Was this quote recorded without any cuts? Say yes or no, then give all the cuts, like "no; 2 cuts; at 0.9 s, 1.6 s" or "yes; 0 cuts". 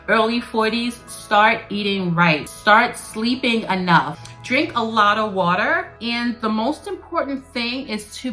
no; 3 cuts; at 2.5 s, 4.2 s, 5.9 s